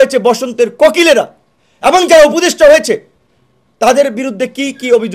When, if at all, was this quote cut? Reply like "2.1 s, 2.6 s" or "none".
1.7 s